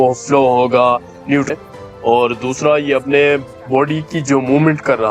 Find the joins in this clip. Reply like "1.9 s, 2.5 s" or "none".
1.5 s